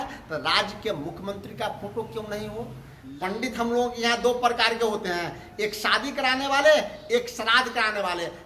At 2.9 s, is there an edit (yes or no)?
yes